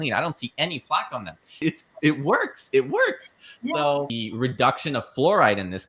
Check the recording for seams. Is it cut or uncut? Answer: cut